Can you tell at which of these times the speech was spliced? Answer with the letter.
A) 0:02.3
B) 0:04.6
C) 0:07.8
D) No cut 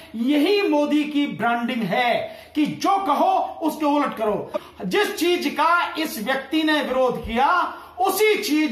B